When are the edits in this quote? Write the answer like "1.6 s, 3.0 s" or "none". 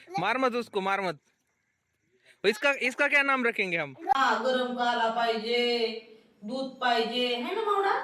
4.1 s